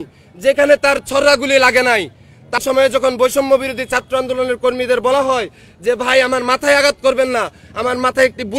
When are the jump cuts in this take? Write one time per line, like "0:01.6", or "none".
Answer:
0:02.6